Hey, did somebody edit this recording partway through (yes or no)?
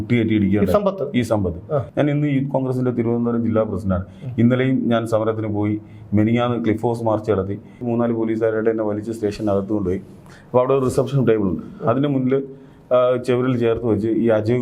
yes